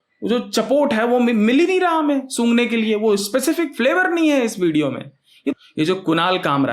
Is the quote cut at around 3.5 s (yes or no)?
no